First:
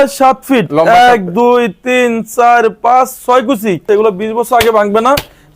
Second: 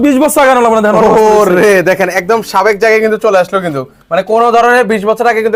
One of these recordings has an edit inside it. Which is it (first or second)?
first